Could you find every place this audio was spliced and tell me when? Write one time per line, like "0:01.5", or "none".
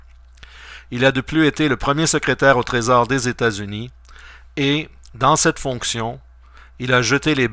0:03.0